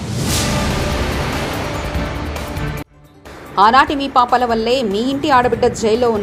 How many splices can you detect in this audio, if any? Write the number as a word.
zero